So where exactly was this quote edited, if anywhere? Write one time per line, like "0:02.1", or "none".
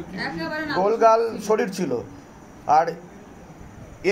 none